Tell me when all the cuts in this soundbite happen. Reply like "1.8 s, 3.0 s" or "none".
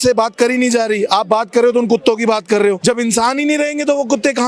2.8 s